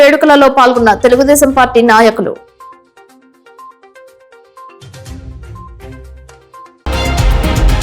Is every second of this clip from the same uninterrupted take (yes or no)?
no